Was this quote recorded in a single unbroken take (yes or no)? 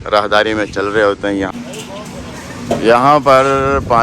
no